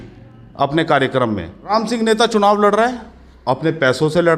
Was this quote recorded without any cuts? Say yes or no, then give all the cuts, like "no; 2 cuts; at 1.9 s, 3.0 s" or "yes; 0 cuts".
no; 1 cut; at 1.7 s